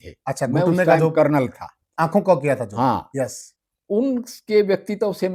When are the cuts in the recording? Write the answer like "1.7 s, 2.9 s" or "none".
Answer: none